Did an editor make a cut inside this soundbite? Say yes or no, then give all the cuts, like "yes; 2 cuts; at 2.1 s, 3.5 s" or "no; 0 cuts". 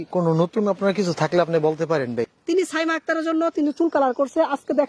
yes; 1 cut; at 2.4 s